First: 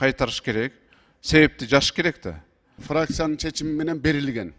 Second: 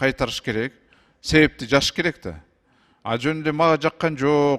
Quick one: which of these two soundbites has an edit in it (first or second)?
first